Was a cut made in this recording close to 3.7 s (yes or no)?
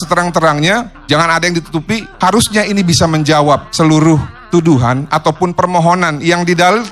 yes